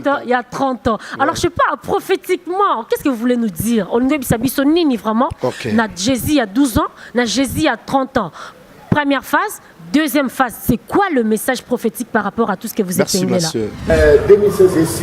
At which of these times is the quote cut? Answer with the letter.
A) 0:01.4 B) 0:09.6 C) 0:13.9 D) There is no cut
C